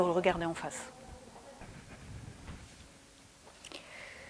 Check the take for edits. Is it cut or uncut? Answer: uncut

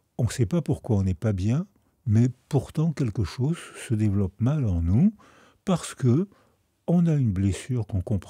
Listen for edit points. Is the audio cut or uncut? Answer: uncut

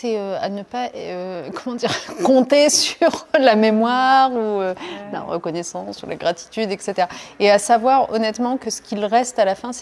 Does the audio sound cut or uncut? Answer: uncut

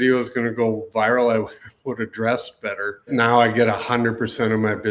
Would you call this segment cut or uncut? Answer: cut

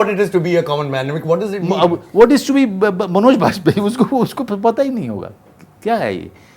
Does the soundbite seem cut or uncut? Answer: uncut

